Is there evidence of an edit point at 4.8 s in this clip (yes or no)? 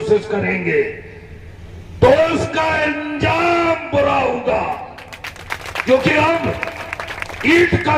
no